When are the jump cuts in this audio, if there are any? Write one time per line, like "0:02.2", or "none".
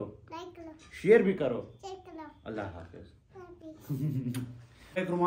none